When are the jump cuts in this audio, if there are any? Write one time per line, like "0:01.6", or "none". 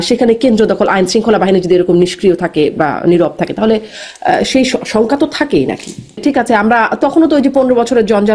0:06.2